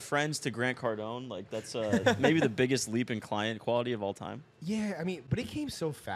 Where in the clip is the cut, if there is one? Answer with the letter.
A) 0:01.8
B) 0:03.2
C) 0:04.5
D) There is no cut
C